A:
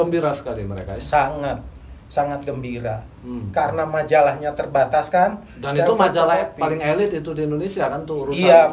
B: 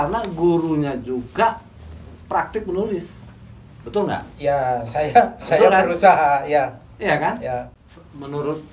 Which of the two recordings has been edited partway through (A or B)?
B